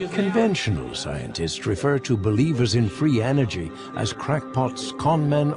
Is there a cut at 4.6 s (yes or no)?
no